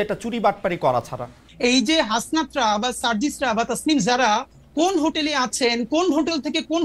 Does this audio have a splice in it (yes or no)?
yes